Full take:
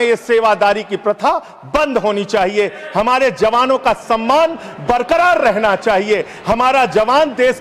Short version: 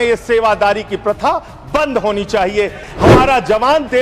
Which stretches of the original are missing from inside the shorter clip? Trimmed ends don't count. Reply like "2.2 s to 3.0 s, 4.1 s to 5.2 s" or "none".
2.8 s to 6.3 s